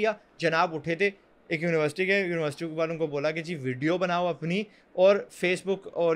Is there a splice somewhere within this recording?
no; 0 cuts

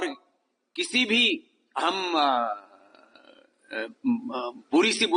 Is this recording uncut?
yes; 0 cuts

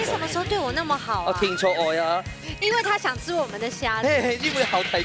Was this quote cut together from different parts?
no; 0 cuts

